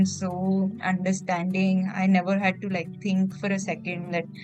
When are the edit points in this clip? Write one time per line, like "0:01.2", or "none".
none